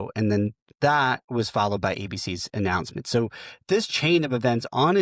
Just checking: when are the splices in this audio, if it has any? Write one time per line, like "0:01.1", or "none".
0:01.2

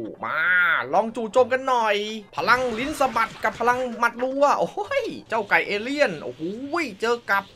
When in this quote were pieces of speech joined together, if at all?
0:02.2
0:05.2

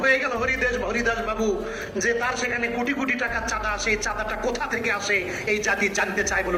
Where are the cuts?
none

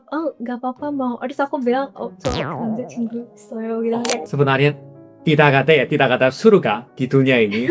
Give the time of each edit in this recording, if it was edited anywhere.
0:04.3

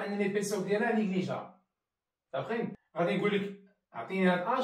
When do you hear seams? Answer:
0:02.8

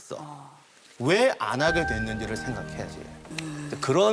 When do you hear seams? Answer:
none

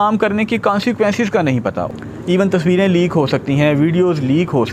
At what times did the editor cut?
0:01.9

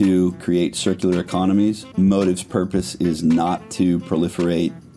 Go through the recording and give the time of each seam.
none

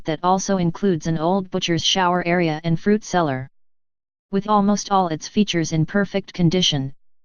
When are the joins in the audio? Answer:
0:06.2

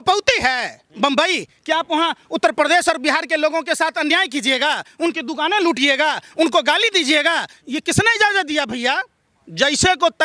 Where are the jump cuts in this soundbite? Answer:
none

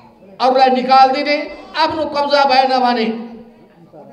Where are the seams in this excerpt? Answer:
0:01.6

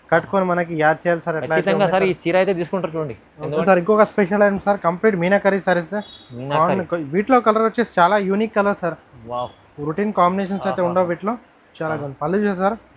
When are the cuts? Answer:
0:03.6

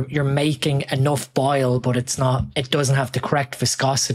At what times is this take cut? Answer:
0:02.5

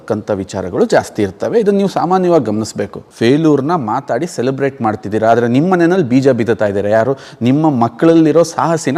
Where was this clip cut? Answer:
0:03.0

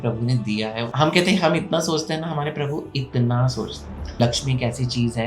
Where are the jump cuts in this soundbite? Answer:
0:00.9
0:04.2

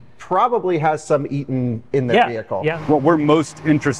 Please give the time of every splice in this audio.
0:02.7

